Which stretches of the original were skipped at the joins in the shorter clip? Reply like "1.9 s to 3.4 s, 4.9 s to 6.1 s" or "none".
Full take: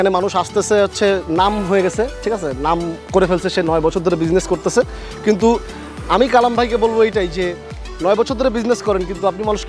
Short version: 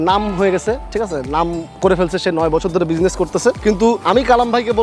5.0 s to 5.8 s